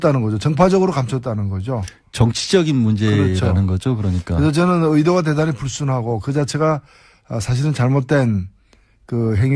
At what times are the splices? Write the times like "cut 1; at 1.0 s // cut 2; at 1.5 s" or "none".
cut 1; at 3.8 s